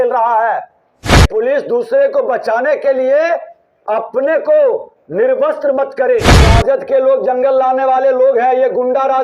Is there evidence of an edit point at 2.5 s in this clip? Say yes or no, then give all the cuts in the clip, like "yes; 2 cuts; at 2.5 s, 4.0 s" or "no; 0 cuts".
no; 2 cuts; at 1.2 s, 6.4 s